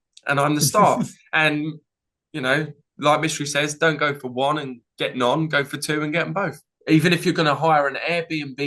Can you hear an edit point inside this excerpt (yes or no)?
yes